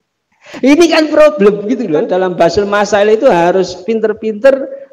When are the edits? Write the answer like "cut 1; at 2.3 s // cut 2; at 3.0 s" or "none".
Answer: cut 1; at 2.1 s